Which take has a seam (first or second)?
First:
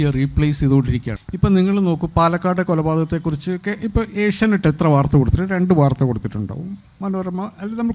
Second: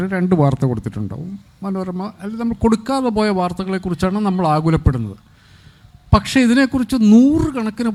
first